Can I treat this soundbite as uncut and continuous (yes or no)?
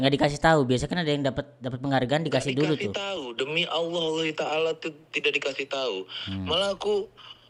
yes